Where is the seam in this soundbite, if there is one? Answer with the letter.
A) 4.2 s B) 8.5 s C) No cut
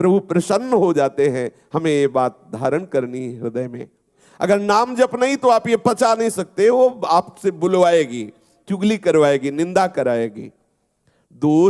A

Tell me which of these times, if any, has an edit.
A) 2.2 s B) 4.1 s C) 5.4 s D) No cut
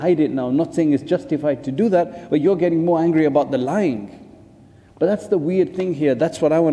D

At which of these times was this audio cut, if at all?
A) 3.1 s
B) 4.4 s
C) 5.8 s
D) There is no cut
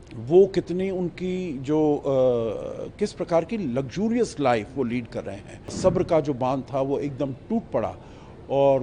C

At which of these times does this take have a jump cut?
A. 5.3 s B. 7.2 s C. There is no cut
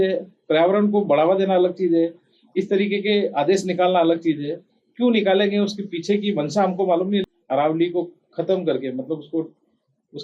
B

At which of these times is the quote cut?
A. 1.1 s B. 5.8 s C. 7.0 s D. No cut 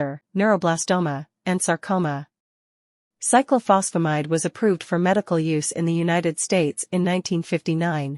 A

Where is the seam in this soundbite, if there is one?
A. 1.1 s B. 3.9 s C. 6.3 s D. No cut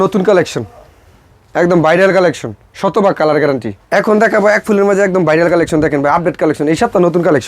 B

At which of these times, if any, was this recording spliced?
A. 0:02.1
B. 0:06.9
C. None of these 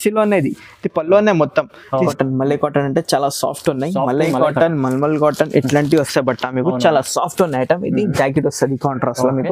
A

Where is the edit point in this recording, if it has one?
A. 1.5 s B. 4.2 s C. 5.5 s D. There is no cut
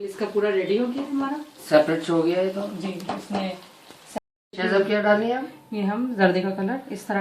B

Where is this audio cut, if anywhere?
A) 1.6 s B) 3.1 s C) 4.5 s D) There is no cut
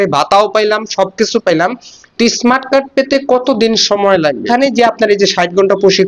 C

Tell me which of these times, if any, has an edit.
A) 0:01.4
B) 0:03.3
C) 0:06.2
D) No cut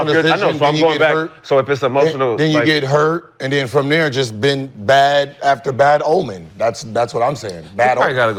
D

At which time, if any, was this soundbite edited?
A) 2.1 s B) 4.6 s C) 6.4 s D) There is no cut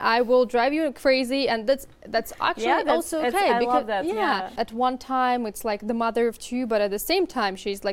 B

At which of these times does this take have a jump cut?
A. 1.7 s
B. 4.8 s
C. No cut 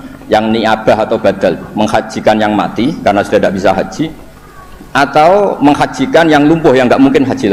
C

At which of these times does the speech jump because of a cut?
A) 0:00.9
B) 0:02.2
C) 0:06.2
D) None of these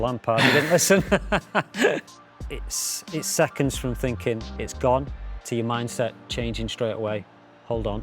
B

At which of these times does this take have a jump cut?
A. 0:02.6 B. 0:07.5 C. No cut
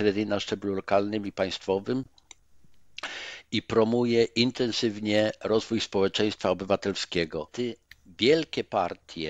B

